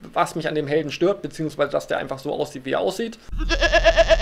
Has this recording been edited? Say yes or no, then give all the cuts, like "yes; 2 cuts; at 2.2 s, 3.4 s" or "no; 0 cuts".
yes; 1 cut; at 1.7 s